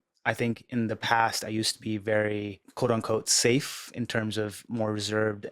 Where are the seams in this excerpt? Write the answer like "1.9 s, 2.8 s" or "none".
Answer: 2.6 s